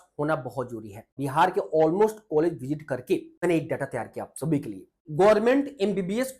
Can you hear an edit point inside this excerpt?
yes; 3 cuts; at 1.2 s, 3.4 s, 5.0 s

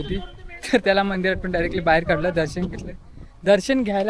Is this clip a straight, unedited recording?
yes; 0 cuts

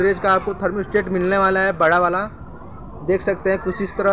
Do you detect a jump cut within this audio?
no; 0 cuts

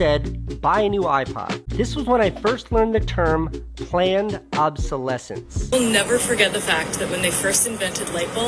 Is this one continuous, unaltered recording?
no; 2 cuts; at 1.6 s, 5.7 s

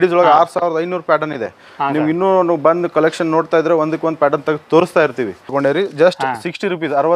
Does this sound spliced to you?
yes; 1 cut; at 5.5 s

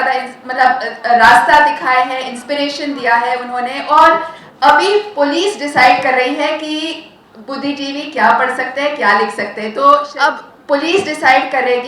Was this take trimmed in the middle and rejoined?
yes; 1 cut; at 10.1 s

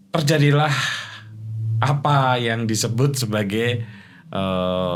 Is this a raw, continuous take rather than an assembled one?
yes; 0 cuts

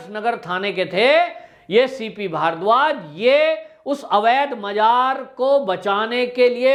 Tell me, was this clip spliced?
no; 0 cuts

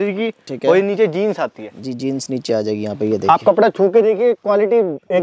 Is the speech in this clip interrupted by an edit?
no; 0 cuts

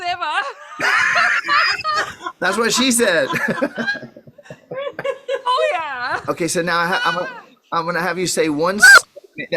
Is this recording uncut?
no; 1 cut; at 6.2 s

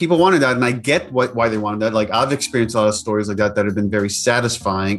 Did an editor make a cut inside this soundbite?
no; 0 cuts

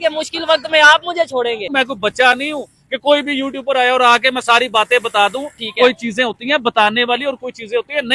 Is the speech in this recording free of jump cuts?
no; 1 cut; at 1.7 s

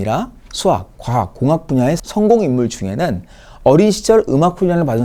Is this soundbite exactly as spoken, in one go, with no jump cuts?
yes; 0 cuts

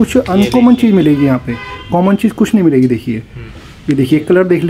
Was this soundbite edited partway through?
no; 0 cuts

